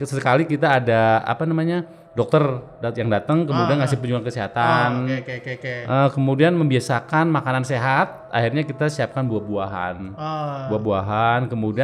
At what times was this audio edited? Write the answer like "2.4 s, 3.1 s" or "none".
none

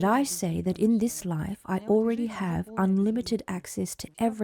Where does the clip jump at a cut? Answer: none

